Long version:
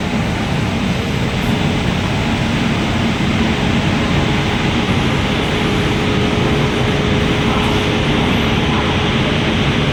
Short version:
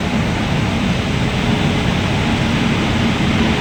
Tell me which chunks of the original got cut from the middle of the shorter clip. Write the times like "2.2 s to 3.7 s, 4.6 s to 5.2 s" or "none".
none